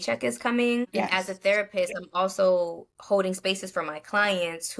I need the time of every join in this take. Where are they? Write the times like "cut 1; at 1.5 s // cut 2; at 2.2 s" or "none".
cut 1; at 1.0 s